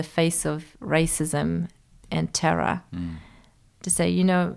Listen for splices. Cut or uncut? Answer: cut